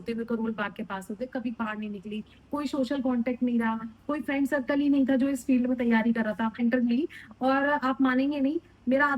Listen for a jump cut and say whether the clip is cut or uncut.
cut